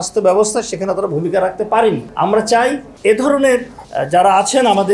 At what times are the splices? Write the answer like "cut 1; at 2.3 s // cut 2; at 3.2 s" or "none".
cut 1; at 2.1 s // cut 2; at 2.9 s // cut 3; at 3.8 s

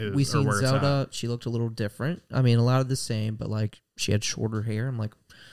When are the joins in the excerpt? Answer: none

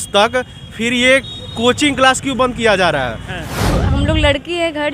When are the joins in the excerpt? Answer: cut 1; at 3.7 s

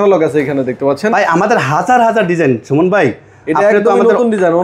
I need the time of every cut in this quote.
none

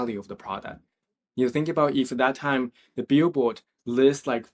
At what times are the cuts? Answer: none

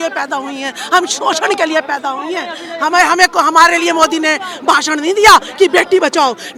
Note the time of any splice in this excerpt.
none

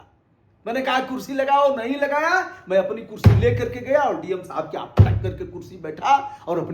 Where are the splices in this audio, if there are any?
none

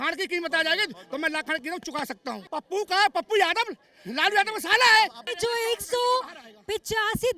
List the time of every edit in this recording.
none

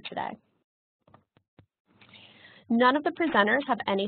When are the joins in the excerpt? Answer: cut 1; at 1.5 s

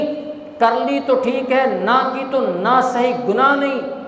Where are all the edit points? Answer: none

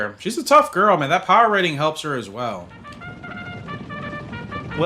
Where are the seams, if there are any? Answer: cut 1; at 2.8 s

